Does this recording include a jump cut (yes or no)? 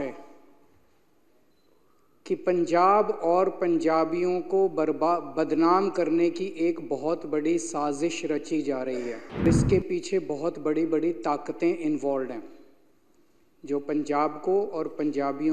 yes